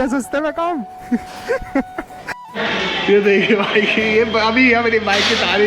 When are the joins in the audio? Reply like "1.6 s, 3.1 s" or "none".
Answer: 2.4 s

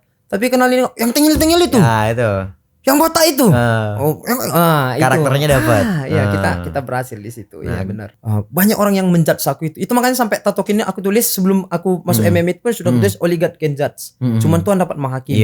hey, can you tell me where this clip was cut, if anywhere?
8.1 s

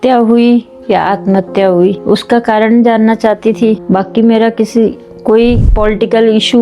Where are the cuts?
2.0 s, 3.8 s, 5.7 s

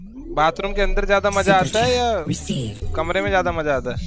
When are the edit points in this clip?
none

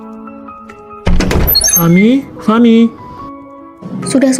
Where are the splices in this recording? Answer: 1.0 s

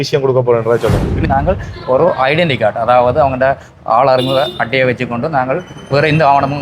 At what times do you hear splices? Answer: 1.2 s

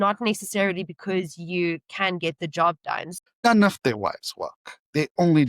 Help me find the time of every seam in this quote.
3.1 s

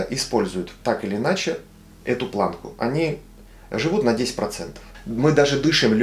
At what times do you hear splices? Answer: 5.0 s

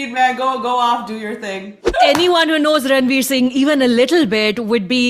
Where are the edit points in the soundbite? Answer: 1.8 s

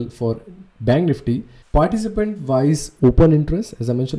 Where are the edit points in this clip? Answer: 1.5 s

